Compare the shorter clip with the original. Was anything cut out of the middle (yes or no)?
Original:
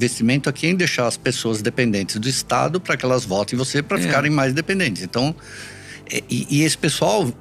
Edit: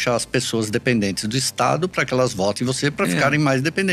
no